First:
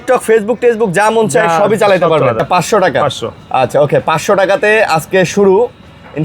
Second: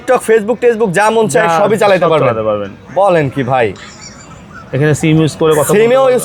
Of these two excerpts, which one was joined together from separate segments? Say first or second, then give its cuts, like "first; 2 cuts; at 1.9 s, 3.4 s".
first; 1 cut; at 2.4 s